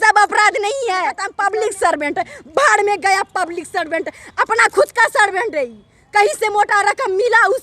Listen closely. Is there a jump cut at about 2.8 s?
no; 1 cut; at 1.3 s

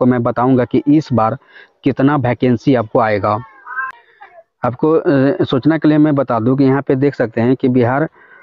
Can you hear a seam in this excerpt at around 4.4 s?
no; 0 cuts

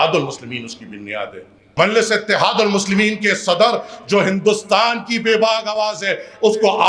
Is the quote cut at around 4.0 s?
no; 1 cut; at 1.6 s

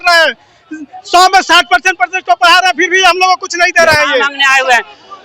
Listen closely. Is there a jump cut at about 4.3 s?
yes; 1 cut; at 4.3 s

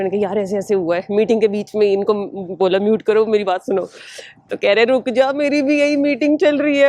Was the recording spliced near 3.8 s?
no; 0 cuts

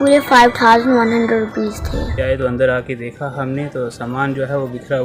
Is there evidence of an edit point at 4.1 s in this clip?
no; 1 cut; at 2.2 s

